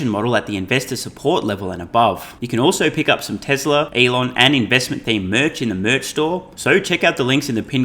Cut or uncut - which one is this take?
cut